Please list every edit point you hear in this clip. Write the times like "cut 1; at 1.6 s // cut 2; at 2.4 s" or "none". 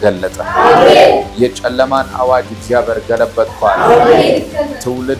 none